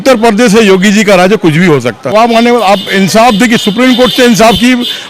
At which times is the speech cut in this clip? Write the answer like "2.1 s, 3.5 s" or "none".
2.1 s